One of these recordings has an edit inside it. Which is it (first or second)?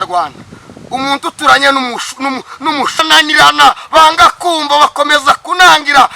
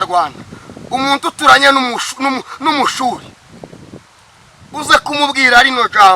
first